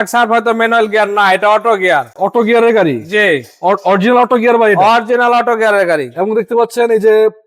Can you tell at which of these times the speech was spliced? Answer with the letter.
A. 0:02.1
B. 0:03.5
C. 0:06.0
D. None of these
D